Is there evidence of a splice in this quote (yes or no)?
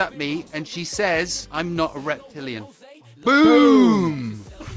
no